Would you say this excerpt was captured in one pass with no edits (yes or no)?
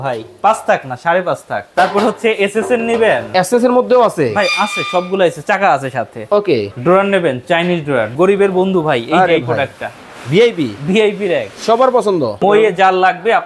no